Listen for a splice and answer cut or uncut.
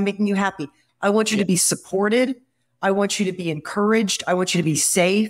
uncut